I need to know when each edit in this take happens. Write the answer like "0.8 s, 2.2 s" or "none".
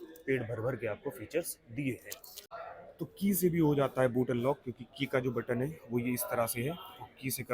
2.6 s